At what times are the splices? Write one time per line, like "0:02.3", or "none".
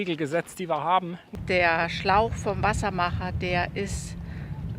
0:01.2